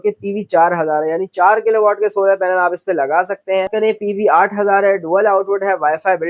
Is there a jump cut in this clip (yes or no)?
yes